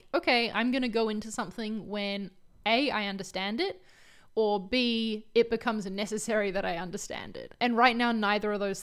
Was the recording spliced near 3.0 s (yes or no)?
no